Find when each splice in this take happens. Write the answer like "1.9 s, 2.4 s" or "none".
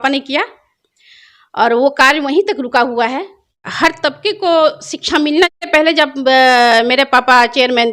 3.7 s, 5.6 s